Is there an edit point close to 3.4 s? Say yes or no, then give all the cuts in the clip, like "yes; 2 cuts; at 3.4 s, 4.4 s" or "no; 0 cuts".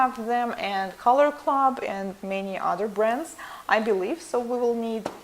no; 1 cut; at 1.6 s